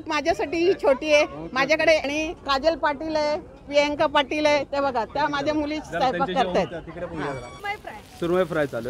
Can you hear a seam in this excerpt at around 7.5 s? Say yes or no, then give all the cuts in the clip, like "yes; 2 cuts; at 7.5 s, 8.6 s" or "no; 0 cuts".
yes; 2 cuts; at 2.0 s, 7.5 s